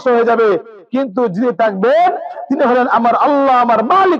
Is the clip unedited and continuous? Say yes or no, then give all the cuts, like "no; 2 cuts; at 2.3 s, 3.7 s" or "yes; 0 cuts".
yes; 0 cuts